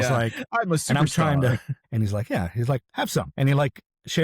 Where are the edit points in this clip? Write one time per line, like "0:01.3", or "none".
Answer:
0:01.8
0:03.3